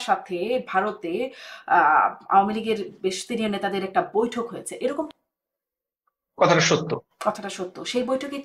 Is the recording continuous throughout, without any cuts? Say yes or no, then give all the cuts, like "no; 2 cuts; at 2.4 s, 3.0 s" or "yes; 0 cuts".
no; 1 cut; at 5.1 s